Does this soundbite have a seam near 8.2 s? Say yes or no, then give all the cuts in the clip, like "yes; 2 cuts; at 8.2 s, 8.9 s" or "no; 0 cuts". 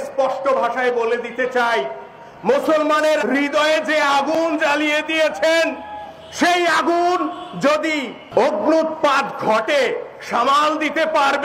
yes; 1 cut; at 8.2 s